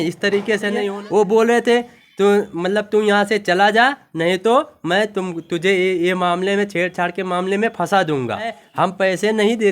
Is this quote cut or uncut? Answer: cut